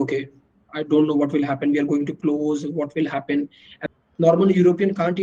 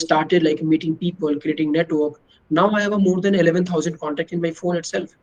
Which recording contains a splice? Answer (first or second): first